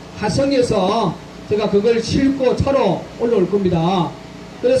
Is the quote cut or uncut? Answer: uncut